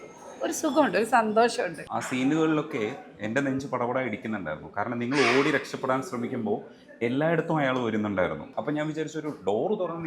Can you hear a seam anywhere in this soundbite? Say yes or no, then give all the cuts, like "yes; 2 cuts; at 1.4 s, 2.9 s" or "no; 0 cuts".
yes; 2 cuts; at 1.8 s, 8.5 s